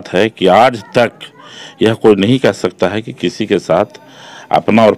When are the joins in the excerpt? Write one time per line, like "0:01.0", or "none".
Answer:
none